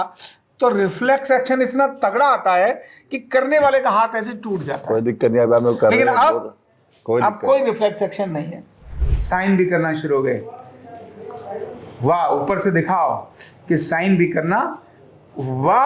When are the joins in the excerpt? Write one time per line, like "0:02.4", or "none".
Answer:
0:09.1